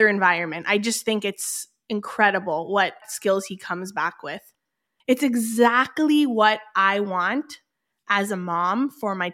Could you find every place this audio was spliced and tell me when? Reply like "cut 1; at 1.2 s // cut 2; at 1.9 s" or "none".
cut 1; at 4.9 s